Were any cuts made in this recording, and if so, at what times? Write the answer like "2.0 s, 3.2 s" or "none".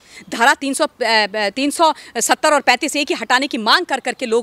none

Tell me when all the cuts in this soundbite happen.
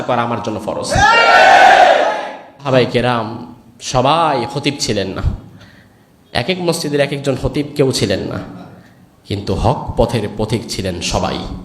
2.7 s

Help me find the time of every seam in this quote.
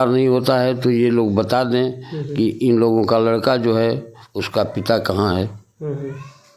none

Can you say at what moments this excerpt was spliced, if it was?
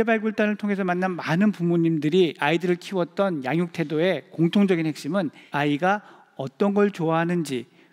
5.4 s

